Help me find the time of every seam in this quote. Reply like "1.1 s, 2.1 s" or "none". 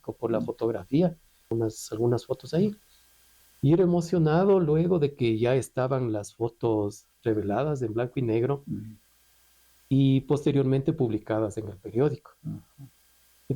1.5 s